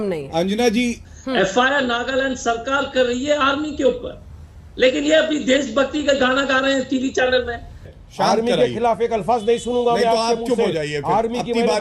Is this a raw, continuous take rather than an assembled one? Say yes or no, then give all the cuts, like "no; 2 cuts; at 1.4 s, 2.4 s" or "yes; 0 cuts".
no; 2 cuts; at 1.1 s, 8.0 s